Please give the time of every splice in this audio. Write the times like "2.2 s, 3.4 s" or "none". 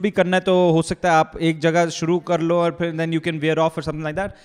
none